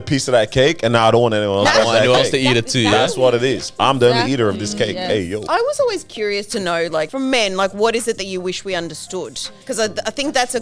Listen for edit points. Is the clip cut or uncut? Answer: cut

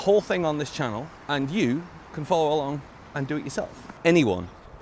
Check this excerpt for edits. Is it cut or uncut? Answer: cut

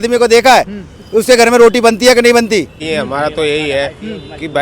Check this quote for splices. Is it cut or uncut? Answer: cut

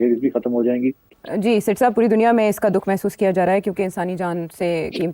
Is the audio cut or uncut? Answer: uncut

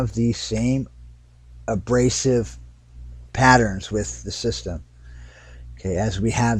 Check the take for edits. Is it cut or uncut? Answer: cut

